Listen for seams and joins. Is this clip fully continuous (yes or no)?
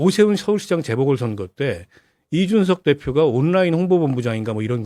yes